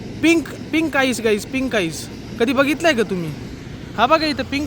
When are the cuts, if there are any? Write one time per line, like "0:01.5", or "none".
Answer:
0:02.1